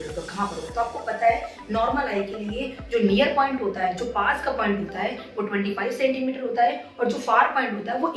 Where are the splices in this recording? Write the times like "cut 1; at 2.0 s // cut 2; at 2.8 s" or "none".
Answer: none